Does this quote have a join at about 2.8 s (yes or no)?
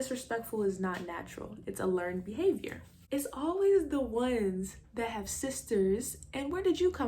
yes